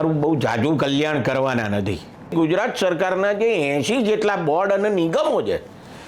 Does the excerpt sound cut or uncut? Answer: cut